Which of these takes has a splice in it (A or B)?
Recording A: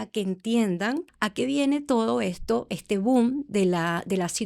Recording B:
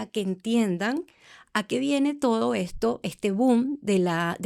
A